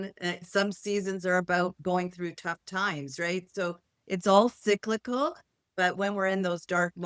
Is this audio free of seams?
yes; 0 cuts

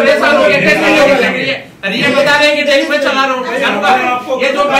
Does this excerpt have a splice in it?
no; 0 cuts

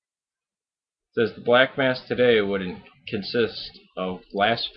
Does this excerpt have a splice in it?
yes; 1 cut; at 1.8 s

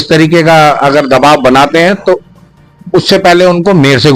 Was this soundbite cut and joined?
no; 0 cuts

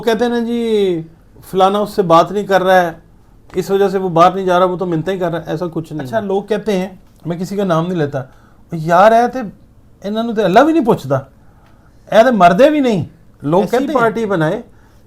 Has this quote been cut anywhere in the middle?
yes; 2 cuts; at 6.0 s, 13.9 s

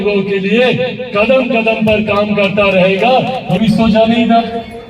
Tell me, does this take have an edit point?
yes; 1 cut; at 3.4 s

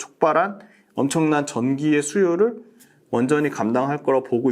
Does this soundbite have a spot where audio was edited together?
no; 0 cuts

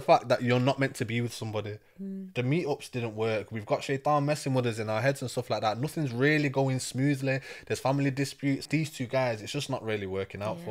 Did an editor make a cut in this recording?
yes; 1 cut; at 8.7 s

